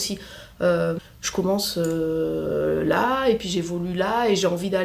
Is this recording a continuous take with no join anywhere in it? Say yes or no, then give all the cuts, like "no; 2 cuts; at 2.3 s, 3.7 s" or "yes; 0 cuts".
no; 1 cut; at 1.0 s